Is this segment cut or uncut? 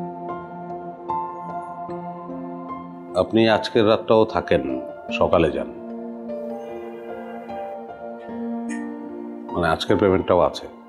uncut